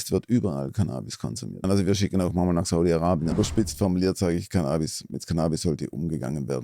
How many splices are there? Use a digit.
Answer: 2